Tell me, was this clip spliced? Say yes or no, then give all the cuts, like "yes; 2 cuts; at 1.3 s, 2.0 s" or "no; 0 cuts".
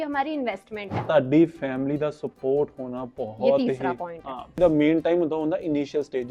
yes; 2 cuts; at 1.0 s, 4.6 s